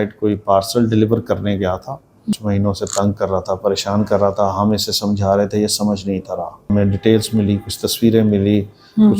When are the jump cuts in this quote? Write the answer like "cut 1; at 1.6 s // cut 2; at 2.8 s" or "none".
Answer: cut 1; at 2.4 s // cut 2; at 6.7 s